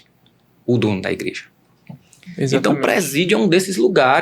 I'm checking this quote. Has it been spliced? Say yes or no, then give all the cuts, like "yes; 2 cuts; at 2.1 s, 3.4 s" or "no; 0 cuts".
yes; 1 cut; at 2.3 s